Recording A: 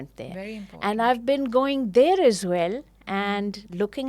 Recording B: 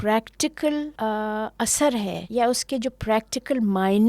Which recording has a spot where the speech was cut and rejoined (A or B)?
B